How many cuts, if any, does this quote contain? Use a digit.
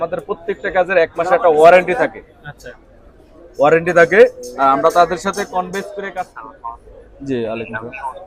1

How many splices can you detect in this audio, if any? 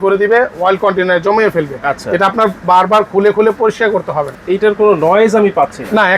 1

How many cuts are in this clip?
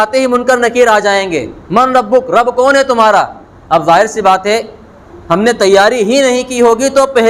0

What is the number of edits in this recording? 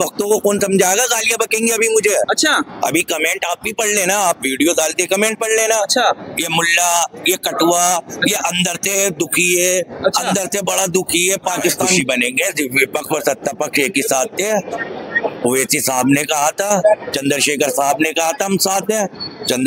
1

